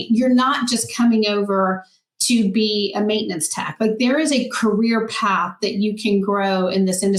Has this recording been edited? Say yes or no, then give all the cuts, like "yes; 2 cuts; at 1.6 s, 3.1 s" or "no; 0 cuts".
no; 0 cuts